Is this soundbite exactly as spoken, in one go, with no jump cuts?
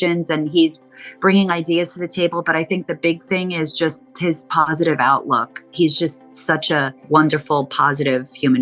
yes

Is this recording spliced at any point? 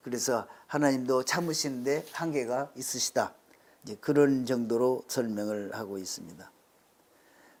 no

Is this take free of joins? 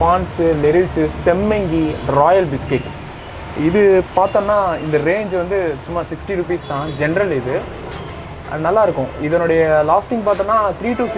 yes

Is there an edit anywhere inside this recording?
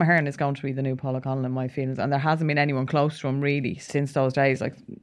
yes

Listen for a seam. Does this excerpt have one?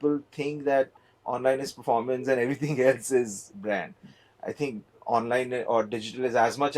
no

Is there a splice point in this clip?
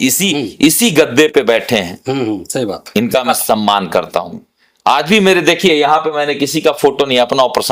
no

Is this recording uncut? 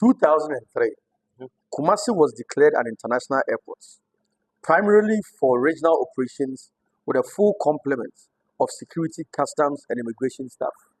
yes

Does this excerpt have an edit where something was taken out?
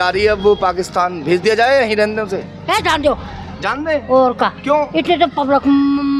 no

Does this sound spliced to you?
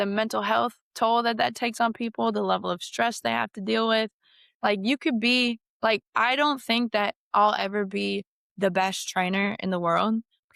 no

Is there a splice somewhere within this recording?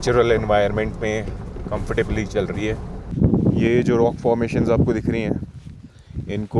yes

